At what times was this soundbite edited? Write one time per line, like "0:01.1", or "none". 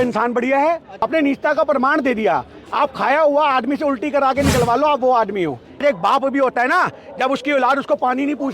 0:01.0
0:05.8